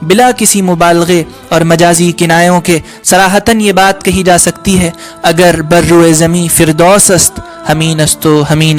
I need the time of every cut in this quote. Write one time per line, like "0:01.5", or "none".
none